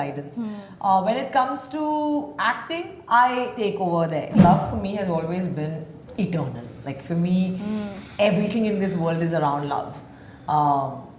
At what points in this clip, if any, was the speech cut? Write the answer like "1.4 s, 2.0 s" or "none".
4.3 s